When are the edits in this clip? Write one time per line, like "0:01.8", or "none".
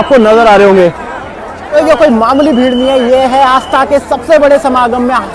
0:01.7